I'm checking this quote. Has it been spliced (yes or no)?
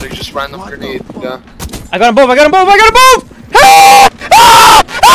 no